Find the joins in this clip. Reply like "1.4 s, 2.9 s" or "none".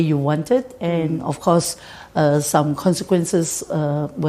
none